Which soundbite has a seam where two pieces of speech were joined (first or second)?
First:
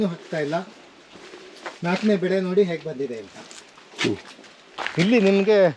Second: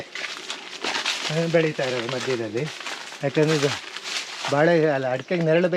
first